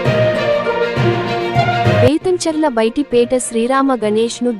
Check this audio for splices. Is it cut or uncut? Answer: cut